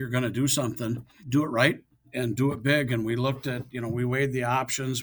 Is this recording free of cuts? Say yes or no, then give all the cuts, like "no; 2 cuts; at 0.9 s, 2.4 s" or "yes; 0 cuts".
no; 2 cuts; at 1.2 s, 2.1 s